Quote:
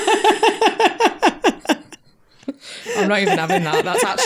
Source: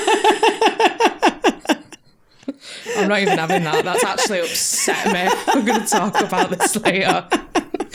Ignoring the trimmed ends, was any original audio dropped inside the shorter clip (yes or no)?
no